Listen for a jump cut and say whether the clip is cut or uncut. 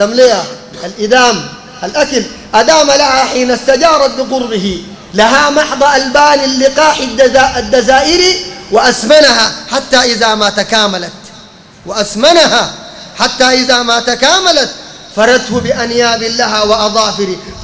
uncut